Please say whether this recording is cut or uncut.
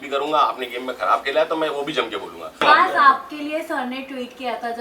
cut